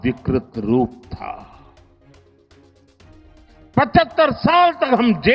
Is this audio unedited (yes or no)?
yes